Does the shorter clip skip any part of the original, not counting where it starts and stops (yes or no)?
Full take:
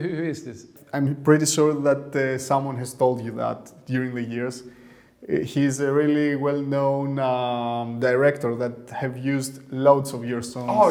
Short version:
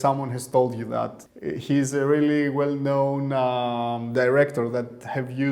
yes